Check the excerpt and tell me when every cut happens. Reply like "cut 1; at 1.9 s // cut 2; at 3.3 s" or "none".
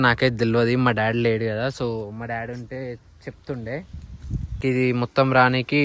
cut 1; at 4.6 s